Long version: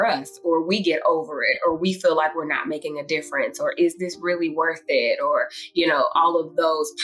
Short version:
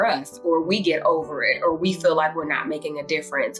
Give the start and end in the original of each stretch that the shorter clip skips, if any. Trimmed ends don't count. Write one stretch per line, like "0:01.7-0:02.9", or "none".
none